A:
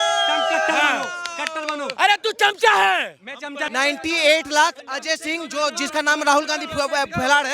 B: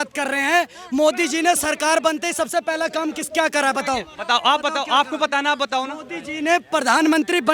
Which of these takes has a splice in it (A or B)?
A